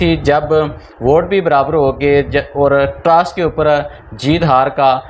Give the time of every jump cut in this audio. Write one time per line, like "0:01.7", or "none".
none